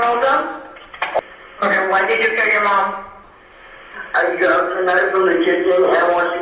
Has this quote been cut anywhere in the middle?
yes; 2 cuts; at 1.2 s, 3.3 s

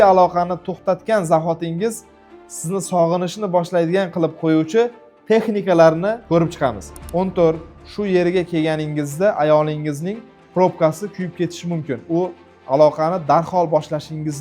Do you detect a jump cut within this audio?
yes; 1 cut; at 6.7 s

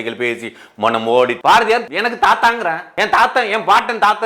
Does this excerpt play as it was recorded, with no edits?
no; 2 cuts; at 1.6 s, 2.8 s

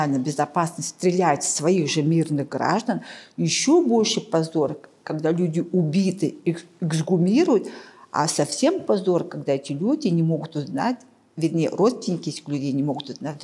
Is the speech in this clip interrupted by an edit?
no; 0 cuts

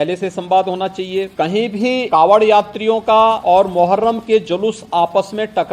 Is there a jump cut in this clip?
yes; 3 cuts; at 1.3 s, 2.1 s, 3.4 s

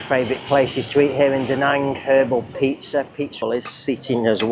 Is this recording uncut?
no; 1 cut; at 3.4 s

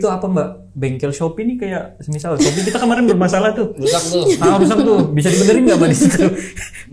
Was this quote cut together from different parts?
no; 0 cuts

